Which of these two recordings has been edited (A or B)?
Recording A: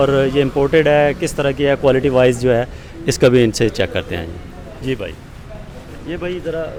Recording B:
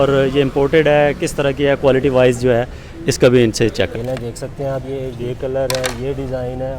B